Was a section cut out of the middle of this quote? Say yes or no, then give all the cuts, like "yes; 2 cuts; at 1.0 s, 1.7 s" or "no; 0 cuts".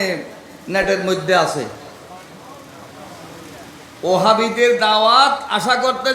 no; 0 cuts